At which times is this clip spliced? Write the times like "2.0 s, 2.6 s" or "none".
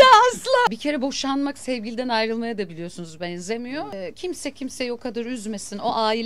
0.7 s, 3.9 s